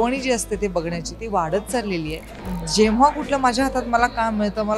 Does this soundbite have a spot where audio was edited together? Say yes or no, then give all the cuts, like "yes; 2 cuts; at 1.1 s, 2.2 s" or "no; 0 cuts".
yes; 1 cut; at 2.5 s